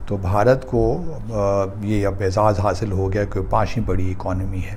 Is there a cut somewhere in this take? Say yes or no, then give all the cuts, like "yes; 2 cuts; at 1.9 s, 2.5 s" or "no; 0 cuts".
no; 0 cuts